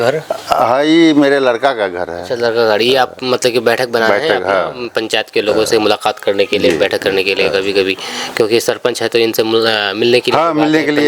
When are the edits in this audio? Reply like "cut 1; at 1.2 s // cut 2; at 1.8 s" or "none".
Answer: none